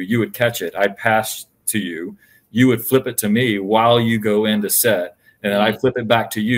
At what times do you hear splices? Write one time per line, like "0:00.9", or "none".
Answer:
none